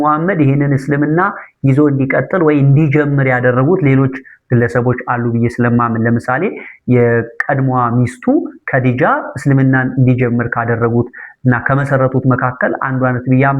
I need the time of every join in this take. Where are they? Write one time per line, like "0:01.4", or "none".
none